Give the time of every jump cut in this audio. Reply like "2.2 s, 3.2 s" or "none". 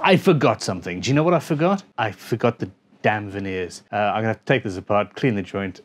1.9 s, 3.8 s